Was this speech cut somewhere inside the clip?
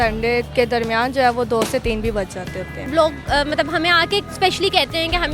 yes; 1 cut; at 2.9 s

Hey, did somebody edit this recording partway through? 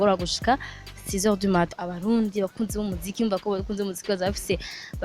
yes; 1 cut; at 1.7 s

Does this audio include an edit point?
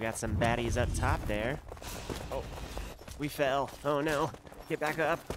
no; 0 cuts

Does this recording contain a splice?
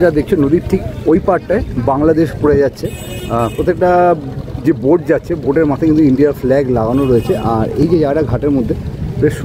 no; 0 cuts

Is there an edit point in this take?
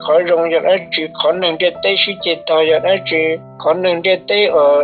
yes; 1 cut; at 3.5 s

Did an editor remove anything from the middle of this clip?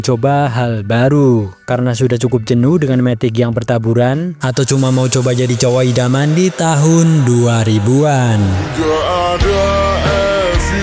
no; 0 cuts

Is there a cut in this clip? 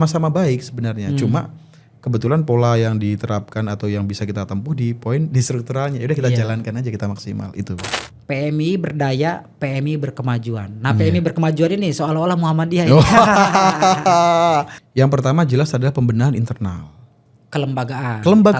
yes; 2 cuts; at 7.9 s, 14.8 s

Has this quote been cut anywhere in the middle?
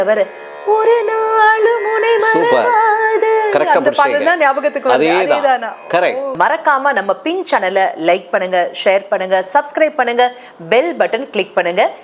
yes; 1 cut; at 6.3 s

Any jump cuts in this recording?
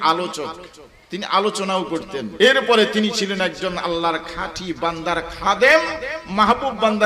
yes; 1 cut; at 2.3 s

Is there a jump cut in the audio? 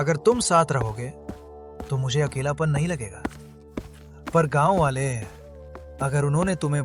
no; 0 cuts

